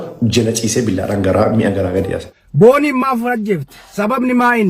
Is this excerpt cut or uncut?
cut